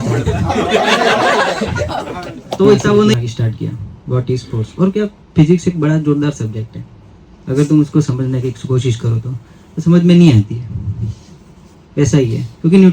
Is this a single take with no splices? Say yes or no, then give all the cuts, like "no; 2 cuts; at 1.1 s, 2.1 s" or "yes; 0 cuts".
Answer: no; 1 cut; at 3.1 s